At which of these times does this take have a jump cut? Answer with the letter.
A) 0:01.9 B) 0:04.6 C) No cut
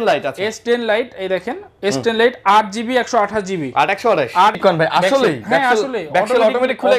B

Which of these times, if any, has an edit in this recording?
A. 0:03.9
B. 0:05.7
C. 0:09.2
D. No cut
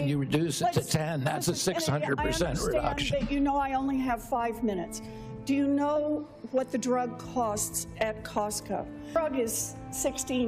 C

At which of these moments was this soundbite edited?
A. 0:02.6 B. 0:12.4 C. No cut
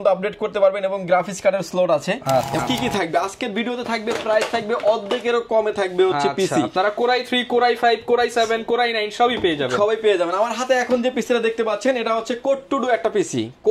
A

